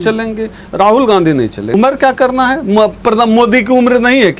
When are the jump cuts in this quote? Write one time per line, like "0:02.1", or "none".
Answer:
0:01.7